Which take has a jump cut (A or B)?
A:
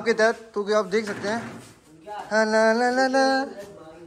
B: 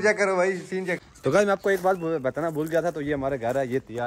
B